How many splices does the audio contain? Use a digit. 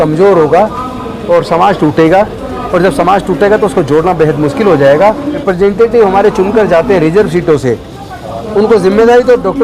1